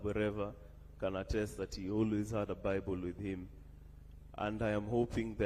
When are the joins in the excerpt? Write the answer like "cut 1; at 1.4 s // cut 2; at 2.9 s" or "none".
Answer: none